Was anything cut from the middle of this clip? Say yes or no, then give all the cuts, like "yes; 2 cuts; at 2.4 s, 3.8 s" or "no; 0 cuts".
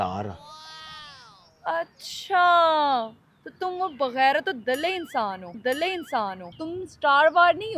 yes; 1 cut; at 6.5 s